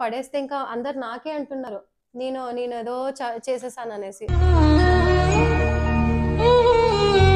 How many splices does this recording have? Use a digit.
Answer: 0